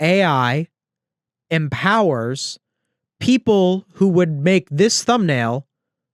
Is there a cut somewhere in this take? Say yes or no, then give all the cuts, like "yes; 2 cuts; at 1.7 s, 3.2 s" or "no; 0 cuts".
no; 0 cuts